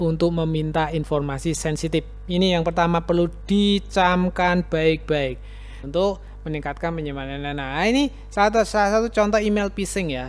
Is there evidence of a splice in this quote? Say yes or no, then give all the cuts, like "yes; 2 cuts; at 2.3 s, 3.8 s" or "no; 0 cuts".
yes; 1 cut; at 5.8 s